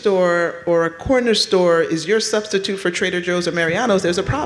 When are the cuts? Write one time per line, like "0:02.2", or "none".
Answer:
none